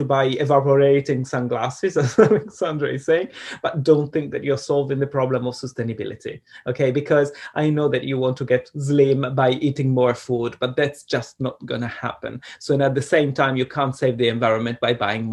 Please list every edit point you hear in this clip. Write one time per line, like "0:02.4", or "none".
none